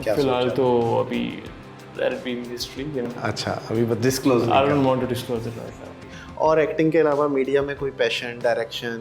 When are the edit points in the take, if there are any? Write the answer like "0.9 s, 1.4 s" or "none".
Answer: 5.7 s